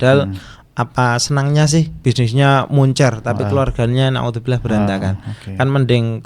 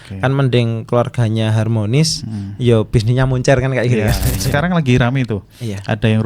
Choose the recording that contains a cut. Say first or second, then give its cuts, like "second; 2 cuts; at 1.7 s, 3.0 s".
second; 1 cut; at 4.4 s